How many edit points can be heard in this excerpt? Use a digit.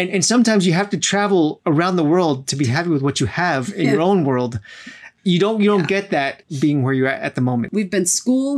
4